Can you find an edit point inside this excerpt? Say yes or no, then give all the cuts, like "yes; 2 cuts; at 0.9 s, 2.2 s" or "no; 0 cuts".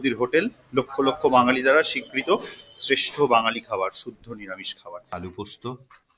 yes; 1 cut; at 5.0 s